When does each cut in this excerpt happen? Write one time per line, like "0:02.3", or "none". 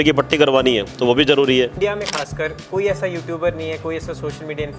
0:01.7